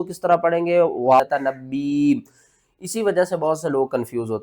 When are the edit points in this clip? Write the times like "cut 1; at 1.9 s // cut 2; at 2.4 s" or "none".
cut 1; at 1.2 s